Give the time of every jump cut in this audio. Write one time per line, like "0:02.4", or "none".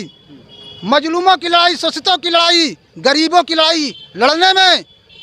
none